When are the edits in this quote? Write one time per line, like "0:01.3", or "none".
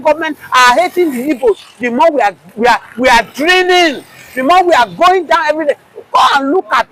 none